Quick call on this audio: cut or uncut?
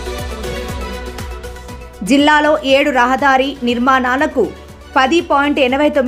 uncut